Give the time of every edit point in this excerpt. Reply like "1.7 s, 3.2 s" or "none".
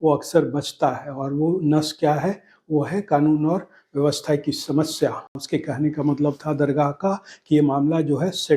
5.4 s

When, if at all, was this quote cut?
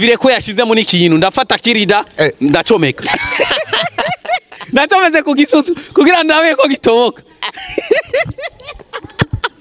none

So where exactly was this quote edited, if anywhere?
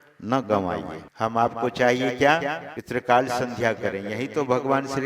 1.0 s, 2.7 s

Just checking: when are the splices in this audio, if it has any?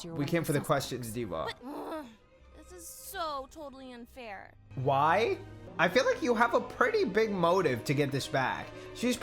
1.6 s, 4.6 s, 5.6 s

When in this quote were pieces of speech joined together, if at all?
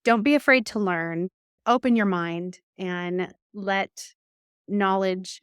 1.5 s

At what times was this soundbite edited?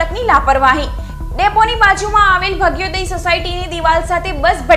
none

